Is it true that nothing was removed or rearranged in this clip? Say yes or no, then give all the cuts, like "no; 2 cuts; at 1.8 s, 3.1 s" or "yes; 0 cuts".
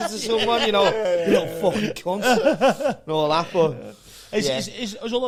yes; 0 cuts